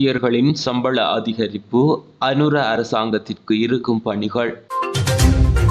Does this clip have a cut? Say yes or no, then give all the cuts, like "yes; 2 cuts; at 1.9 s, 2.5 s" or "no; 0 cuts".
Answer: yes; 1 cut; at 4.6 s